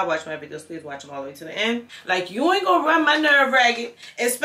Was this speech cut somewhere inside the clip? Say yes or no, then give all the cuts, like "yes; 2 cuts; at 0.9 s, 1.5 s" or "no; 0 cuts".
yes; 1 cut; at 2.0 s